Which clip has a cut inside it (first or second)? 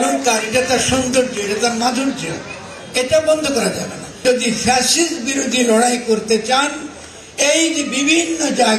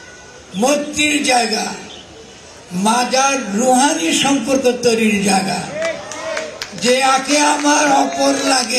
first